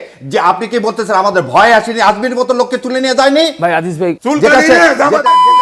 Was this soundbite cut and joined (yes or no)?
yes